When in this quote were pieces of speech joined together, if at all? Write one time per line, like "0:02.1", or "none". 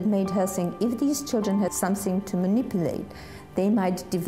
0:01.7